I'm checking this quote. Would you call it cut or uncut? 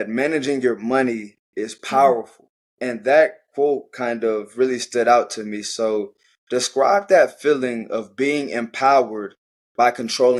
uncut